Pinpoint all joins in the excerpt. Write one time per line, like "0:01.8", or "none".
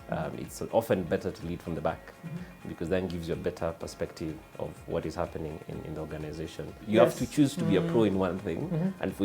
0:06.8